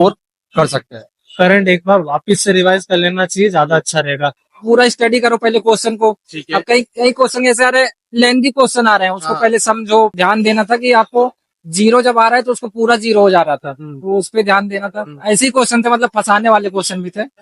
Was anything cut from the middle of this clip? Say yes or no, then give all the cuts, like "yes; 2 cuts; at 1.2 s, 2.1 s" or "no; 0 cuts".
yes; 2 cuts; at 4.5 s, 10.1 s